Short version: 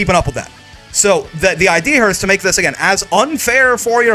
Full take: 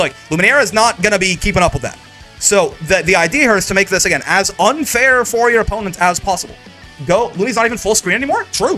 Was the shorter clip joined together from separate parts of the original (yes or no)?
no